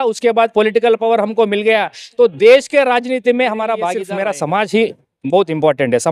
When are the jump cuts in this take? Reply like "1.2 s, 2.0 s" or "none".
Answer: 4.0 s